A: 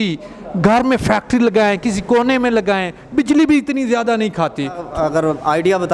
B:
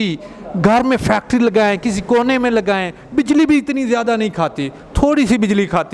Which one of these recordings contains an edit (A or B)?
A